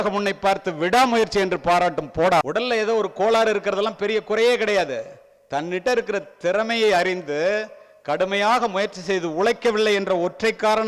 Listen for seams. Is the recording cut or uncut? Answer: cut